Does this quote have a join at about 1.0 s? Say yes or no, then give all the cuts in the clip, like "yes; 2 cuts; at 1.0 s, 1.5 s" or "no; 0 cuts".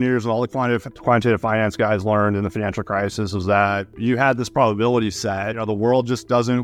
no; 2 cuts; at 3.9 s, 5.6 s